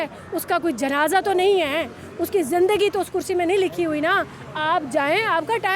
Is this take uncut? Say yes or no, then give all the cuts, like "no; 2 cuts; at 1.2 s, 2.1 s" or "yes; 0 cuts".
yes; 0 cuts